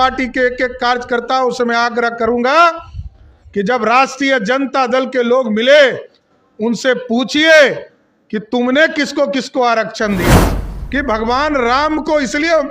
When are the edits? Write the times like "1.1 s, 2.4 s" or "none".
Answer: 10.3 s